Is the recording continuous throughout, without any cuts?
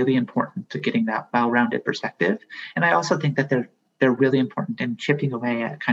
yes; 0 cuts

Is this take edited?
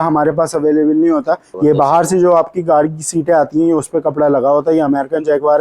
yes; 1 cut; at 1.5 s

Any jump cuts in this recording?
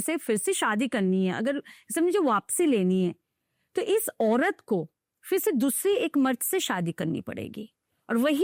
no; 0 cuts

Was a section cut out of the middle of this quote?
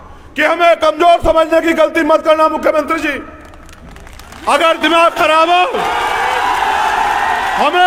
no; 0 cuts

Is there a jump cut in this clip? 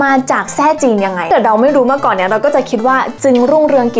yes; 1 cut; at 1.3 s

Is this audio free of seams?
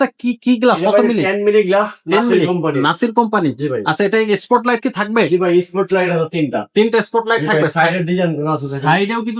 yes; 0 cuts

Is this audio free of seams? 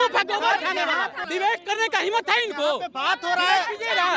no; 1 cut; at 1.1 s

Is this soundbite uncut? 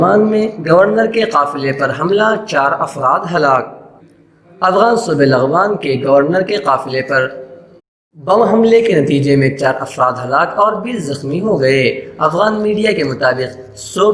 yes; 0 cuts

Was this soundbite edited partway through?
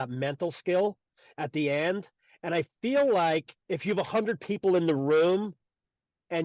yes; 1 cut; at 3.5 s

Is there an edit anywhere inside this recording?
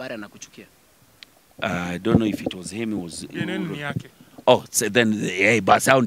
no; 0 cuts

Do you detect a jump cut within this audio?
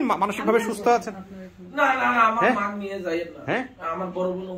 no; 0 cuts

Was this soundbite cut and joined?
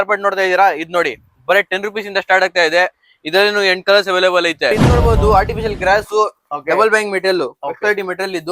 yes; 1 cut; at 4.8 s

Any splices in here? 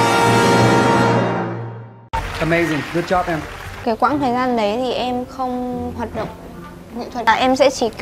yes; 2 cuts; at 3.8 s, 7.2 s

